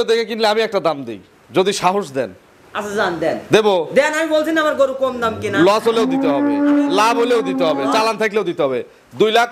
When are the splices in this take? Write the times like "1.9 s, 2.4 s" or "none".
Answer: none